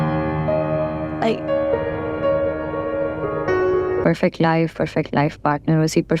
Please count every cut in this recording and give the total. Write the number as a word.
one